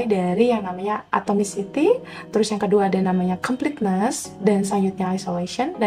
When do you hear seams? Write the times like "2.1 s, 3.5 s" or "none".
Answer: none